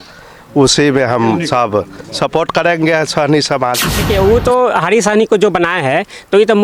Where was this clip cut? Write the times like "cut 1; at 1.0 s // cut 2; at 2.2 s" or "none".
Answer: cut 1; at 3.9 s